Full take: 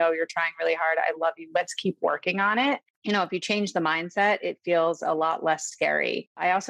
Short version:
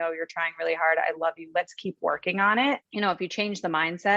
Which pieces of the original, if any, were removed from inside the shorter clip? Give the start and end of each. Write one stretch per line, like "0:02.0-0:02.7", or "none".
0:02.9-0:03.0